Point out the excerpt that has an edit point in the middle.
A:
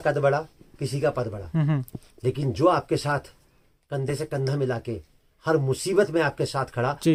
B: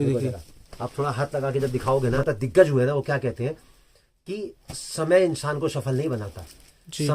B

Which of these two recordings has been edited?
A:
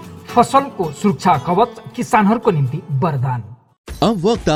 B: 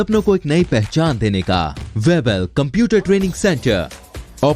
B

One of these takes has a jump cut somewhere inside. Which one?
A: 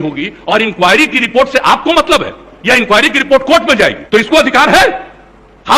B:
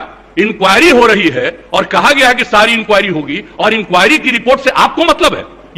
A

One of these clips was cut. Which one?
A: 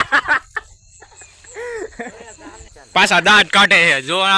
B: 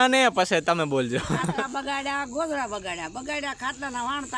A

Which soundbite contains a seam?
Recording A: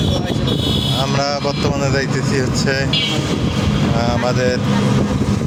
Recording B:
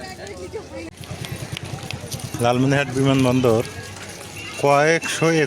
B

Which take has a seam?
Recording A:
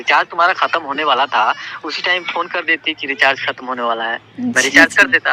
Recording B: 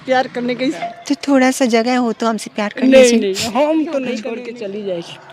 B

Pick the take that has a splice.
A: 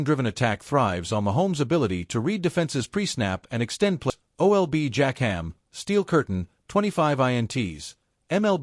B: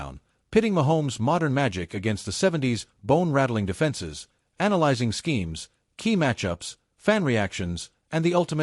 A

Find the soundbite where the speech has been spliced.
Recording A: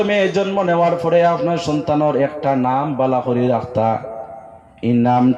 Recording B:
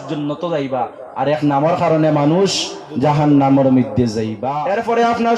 B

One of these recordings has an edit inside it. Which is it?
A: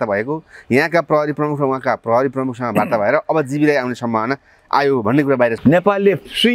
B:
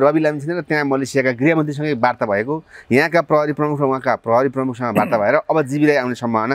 A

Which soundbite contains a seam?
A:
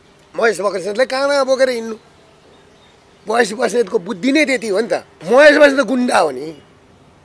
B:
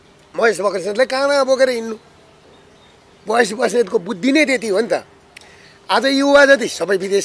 A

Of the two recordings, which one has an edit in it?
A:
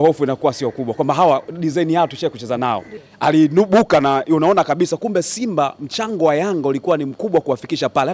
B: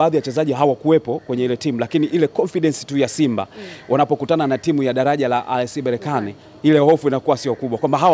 A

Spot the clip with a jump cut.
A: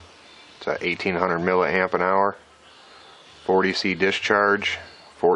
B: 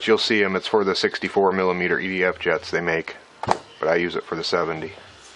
B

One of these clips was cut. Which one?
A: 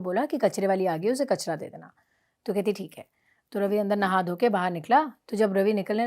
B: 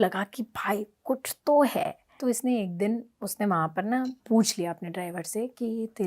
B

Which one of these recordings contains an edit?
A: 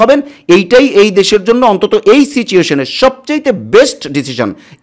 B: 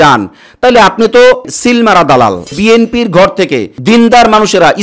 B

